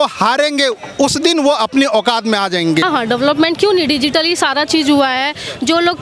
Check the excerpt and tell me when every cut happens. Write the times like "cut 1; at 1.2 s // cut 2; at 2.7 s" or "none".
cut 1; at 2.8 s